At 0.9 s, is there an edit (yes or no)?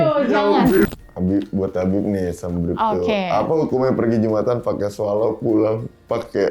yes